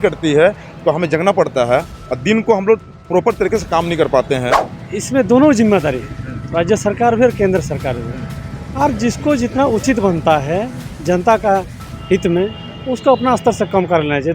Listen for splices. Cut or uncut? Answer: cut